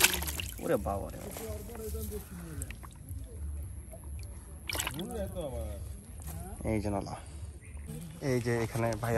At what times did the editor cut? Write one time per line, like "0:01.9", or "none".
0:07.9